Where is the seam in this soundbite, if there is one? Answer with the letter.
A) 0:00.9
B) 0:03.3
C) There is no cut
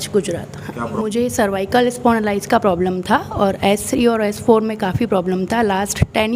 A